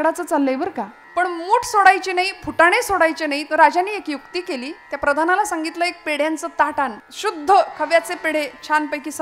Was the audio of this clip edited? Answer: yes; 2 cuts; at 0.9 s, 7.1 s

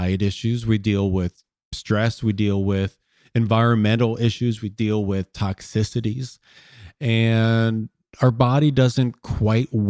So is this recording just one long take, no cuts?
yes; 0 cuts

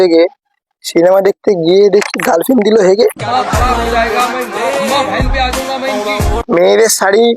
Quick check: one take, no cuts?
no; 1 cut; at 6.4 s

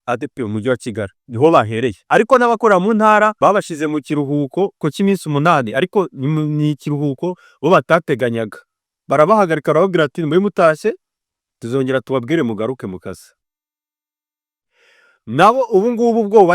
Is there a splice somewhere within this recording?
yes; 4 cuts; at 1.2 s, 2.0 s, 3.3 s, 4.8 s

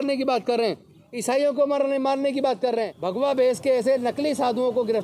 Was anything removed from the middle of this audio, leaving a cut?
yes; 1 cut; at 3.0 s

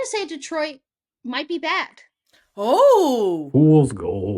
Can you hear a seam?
yes; 1 cut; at 3.4 s

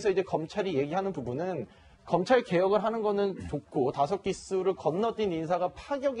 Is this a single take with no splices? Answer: no; 1 cut; at 3.0 s

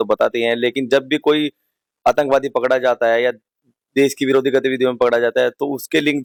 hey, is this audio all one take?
yes; 0 cuts

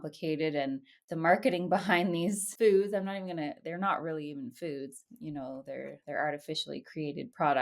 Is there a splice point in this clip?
yes; 1 cut; at 2.5 s

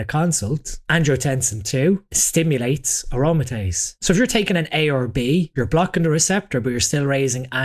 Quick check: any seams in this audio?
yes; 4 cuts; at 0.8 s, 2.2 s, 4.1 s, 5.5 s

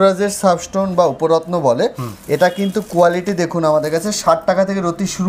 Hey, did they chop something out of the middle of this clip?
no; 0 cuts

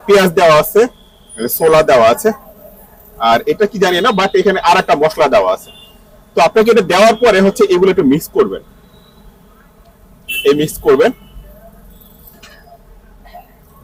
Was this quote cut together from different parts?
no; 0 cuts

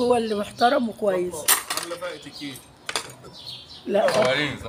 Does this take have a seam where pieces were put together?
no; 0 cuts

